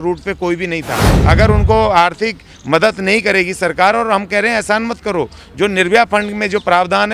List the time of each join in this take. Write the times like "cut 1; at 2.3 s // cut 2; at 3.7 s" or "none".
cut 1; at 1.0 s